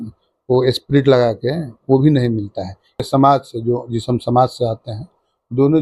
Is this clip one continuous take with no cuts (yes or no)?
no